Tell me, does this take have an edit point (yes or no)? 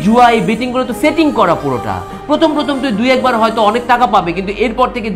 no